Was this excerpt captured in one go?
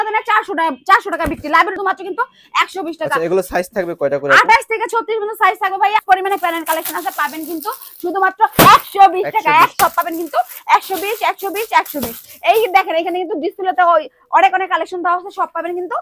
no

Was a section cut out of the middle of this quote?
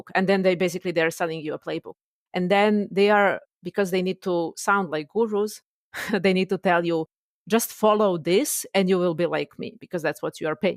no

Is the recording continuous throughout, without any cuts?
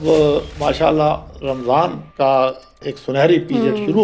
no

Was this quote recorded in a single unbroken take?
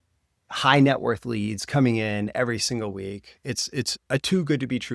yes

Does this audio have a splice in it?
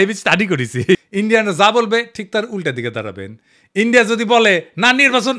yes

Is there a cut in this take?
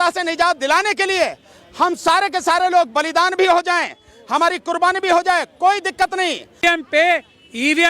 yes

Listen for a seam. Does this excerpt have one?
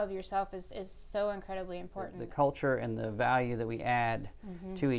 yes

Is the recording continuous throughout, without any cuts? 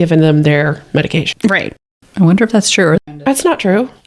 no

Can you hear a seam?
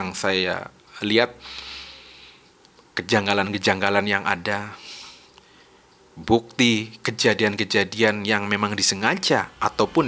no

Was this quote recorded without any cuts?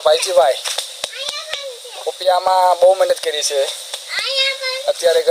yes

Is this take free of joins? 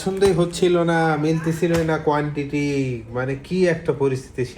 yes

